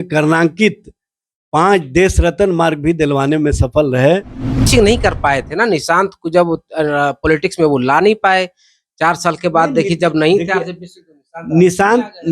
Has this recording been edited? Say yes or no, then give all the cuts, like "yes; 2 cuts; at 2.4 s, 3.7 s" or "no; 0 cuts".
yes; 1 cut; at 4.7 s